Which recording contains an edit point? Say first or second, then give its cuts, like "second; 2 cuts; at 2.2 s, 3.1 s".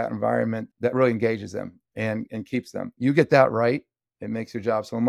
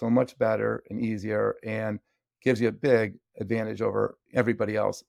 first; 1 cut; at 2.8 s